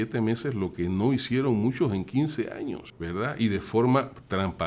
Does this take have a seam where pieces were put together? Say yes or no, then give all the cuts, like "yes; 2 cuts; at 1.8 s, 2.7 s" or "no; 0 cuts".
yes; 1 cut; at 2.9 s